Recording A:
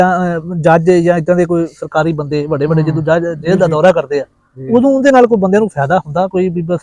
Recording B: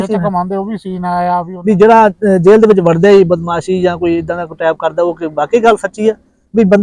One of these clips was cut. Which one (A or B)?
B